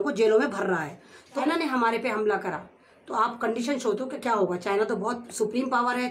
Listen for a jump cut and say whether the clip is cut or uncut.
cut